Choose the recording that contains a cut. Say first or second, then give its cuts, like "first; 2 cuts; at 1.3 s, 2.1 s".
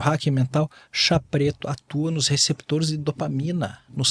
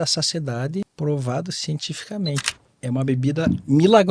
second; 2 cuts; at 0.9 s, 2.6 s